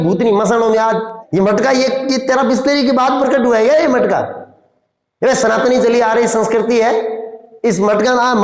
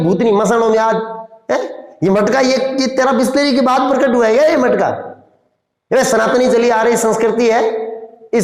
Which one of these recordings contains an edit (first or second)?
first